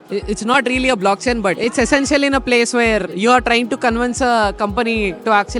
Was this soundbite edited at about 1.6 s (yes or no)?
yes